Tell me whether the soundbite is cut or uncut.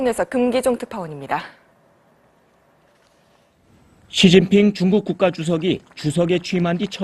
uncut